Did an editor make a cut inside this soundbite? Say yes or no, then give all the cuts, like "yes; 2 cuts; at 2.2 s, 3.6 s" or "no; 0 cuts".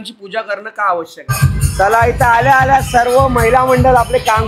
yes; 1 cut; at 1.7 s